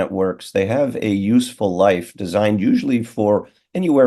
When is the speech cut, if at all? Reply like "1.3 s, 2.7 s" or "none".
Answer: none